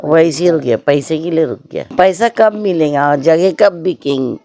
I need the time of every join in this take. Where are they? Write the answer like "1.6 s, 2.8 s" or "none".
1.9 s